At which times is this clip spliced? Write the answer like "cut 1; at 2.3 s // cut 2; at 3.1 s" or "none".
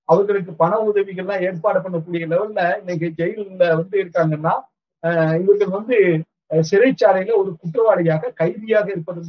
none